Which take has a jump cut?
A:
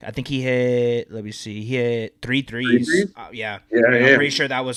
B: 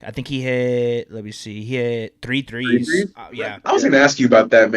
B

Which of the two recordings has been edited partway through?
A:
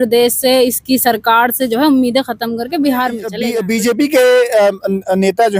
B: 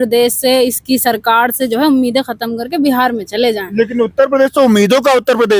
A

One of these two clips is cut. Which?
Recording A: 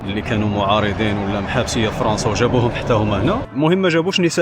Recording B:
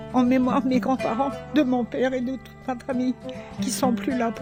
A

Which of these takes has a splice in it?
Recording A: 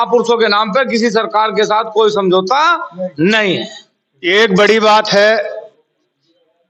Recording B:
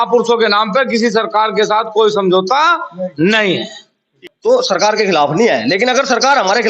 B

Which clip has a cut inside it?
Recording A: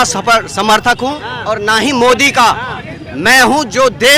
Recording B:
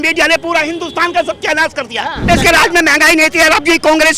B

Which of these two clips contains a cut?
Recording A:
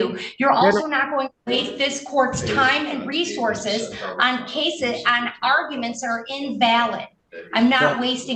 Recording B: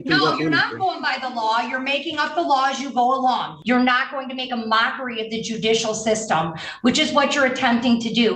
B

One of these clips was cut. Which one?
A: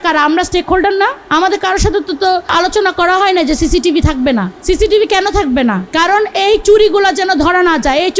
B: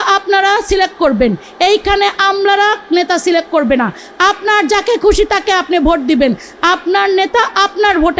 A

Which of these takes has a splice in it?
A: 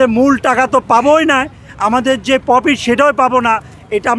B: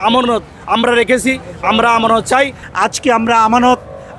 B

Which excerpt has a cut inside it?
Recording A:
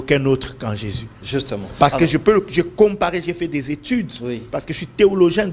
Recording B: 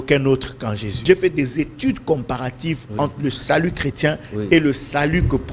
B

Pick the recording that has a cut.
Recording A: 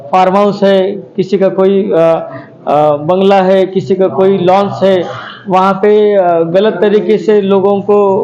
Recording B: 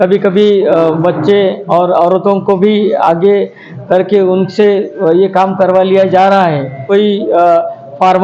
B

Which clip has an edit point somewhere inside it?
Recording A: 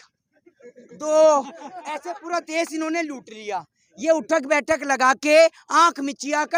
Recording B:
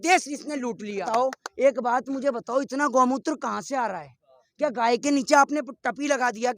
B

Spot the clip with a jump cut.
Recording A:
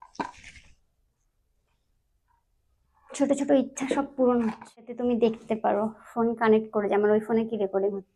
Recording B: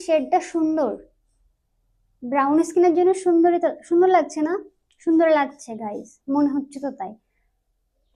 A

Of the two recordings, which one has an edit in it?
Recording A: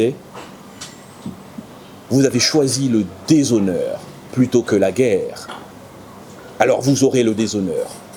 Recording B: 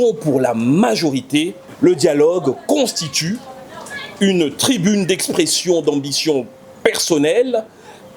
B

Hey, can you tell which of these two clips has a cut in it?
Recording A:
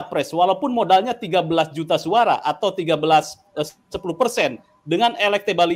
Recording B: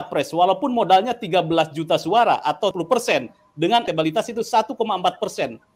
B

